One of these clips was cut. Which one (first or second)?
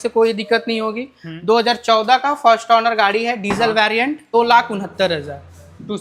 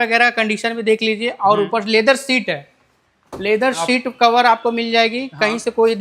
first